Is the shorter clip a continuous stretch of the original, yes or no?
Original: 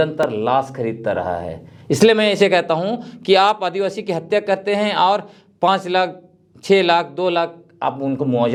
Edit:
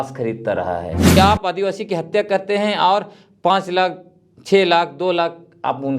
no